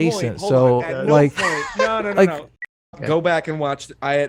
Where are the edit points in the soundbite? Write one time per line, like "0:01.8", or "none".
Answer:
0:02.5